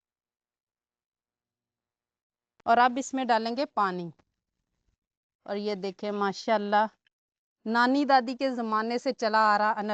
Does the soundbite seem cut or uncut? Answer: uncut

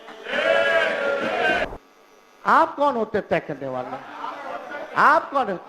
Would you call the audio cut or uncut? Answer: cut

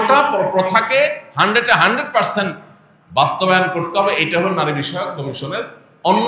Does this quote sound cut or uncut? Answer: uncut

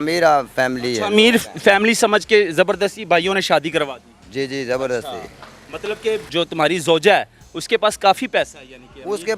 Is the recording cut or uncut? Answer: uncut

